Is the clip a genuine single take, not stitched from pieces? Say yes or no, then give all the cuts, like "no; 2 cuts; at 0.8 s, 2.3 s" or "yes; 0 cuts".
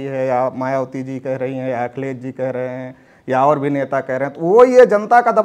yes; 0 cuts